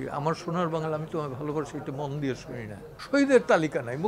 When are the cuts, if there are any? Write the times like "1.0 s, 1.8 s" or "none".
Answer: 2.9 s

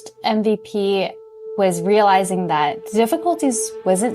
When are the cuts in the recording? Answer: 1.4 s

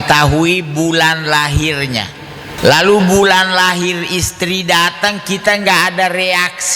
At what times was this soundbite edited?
2.5 s

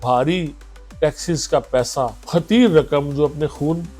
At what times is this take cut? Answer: 2.2 s

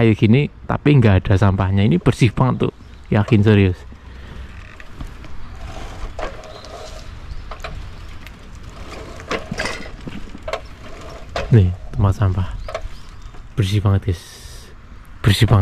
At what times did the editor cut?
none

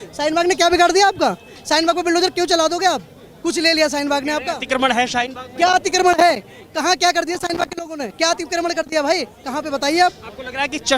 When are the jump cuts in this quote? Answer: none

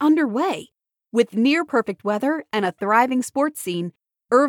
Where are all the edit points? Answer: none

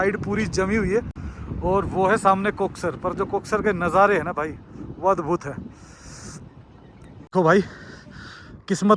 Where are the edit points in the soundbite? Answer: none

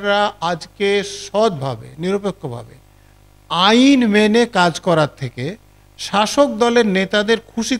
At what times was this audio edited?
none

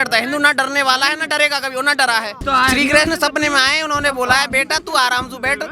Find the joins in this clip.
2.4 s

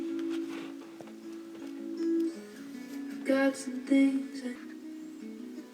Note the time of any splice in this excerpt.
4.5 s

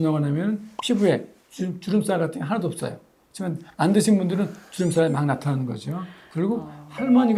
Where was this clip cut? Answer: none

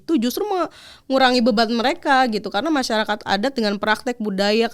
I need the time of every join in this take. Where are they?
none

